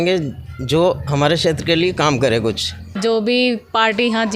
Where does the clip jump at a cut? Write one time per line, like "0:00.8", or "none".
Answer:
0:03.0